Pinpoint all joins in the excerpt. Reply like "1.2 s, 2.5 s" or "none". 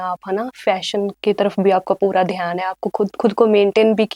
none